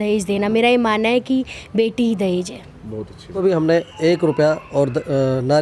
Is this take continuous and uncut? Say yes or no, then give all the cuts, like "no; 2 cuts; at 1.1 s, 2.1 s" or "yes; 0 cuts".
no; 1 cut; at 3.4 s